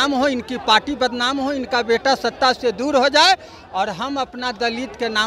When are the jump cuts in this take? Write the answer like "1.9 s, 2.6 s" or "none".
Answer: none